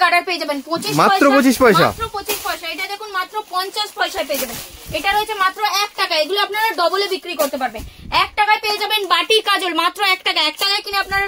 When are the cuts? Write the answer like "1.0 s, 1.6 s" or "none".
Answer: none